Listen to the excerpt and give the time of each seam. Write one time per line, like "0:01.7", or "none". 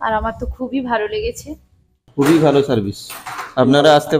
0:02.1